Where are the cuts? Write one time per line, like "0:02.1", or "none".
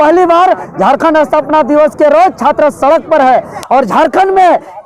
0:03.6